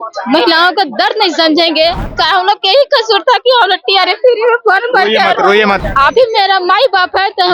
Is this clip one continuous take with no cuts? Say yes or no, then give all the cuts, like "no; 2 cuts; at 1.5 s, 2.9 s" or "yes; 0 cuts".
no; 2 cuts; at 2.0 s, 5.8 s